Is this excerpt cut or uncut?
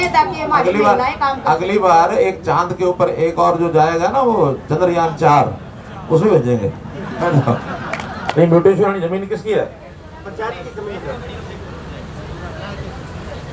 cut